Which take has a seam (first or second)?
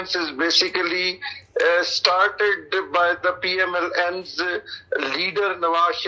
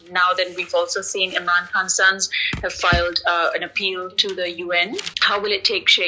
second